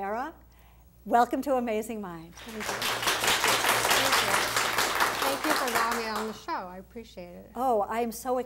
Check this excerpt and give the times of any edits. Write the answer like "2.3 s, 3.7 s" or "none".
3.1 s

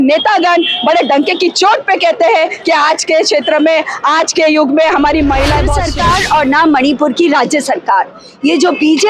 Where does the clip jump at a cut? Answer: 5.8 s

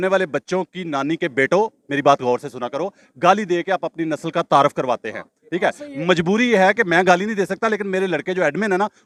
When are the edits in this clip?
none

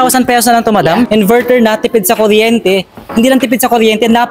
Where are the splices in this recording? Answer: 1.1 s

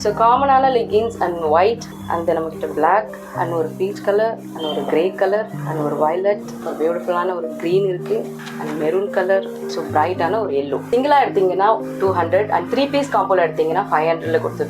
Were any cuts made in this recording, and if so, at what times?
1.9 s, 3.2 s, 4.5 s, 5.6 s, 6.6 s, 8.4 s, 9.6 s, 10.9 s

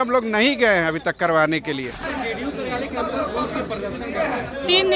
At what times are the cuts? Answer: 2.0 s

